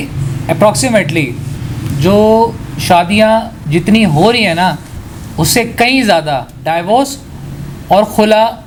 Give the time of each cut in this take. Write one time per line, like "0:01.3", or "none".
none